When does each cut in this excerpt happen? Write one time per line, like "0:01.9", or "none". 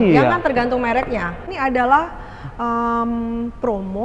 0:01.5